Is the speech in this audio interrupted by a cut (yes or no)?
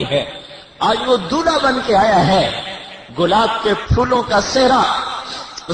yes